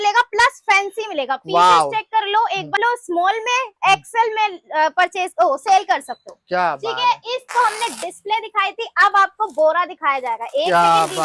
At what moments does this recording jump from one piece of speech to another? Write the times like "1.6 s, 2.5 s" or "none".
2.8 s, 7.5 s